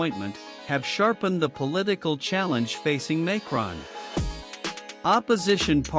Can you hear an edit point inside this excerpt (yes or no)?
yes